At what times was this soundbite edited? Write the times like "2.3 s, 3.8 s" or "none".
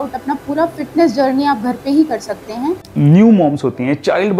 2.9 s